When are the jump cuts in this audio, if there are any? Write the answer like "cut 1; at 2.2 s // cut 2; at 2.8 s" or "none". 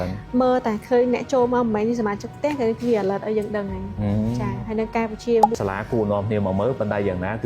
cut 1; at 5.5 s